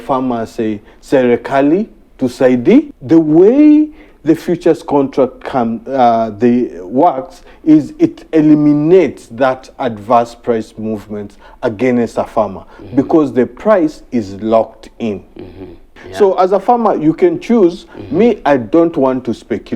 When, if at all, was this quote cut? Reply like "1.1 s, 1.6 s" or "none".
3.0 s, 16.0 s